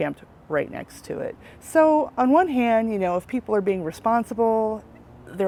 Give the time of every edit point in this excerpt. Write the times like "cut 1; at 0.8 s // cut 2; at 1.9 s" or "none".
none